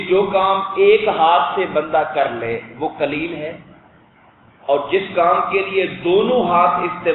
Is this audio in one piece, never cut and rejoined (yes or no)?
yes